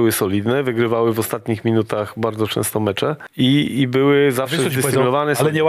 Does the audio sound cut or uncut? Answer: cut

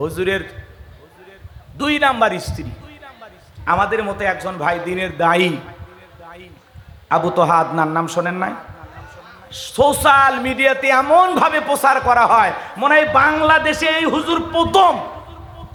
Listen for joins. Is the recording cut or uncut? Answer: uncut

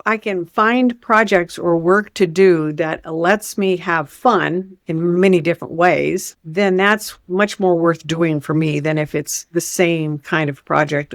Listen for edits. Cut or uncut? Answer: uncut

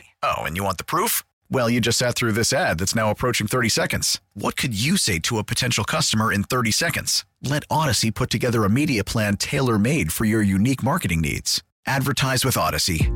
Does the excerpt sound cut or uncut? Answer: uncut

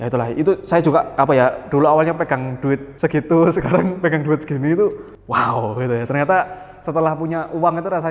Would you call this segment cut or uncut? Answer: uncut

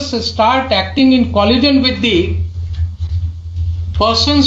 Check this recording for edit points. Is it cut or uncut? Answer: uncut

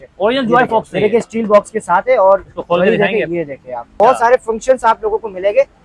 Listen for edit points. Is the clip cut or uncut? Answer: cut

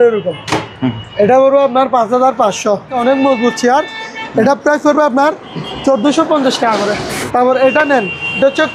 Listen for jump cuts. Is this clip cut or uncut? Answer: cut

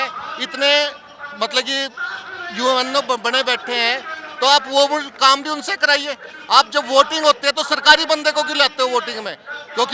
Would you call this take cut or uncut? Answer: uncut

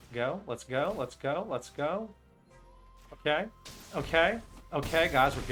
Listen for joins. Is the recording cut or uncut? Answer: uncut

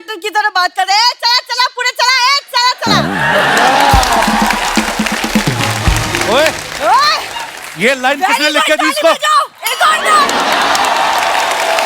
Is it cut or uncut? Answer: uncut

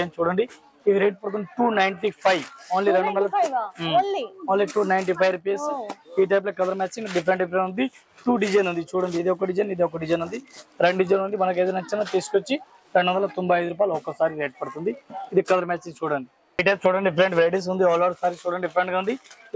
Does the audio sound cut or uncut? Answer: uncut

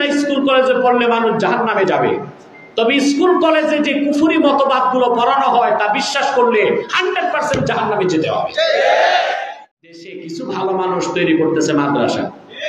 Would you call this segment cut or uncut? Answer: cut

